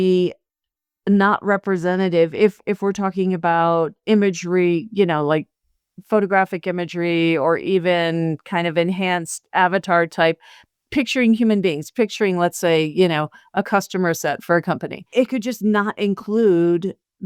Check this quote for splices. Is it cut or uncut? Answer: uncut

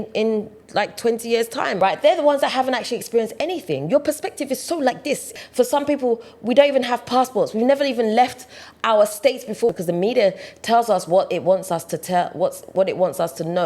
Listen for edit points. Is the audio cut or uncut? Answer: cut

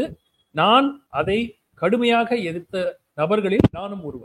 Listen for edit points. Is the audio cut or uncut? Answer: cut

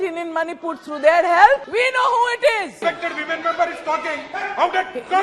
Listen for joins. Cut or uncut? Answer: cut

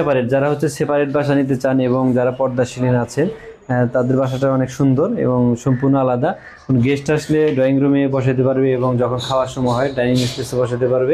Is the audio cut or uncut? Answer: uncut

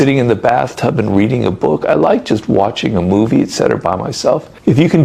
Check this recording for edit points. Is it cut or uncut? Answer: uncut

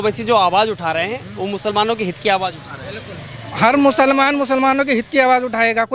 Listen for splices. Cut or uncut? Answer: uncut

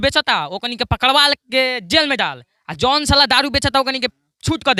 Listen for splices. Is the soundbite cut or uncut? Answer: uncut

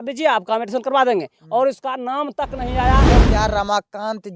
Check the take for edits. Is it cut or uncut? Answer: cut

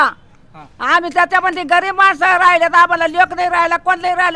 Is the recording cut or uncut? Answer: uncut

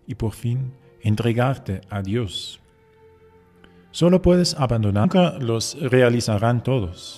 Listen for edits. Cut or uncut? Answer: uncut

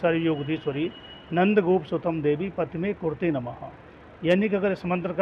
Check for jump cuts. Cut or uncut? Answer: uncut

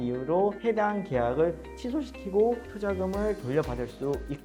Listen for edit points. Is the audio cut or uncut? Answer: uncut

